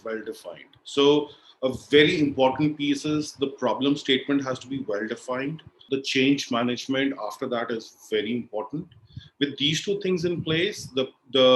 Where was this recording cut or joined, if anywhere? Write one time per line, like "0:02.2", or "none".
0:05.8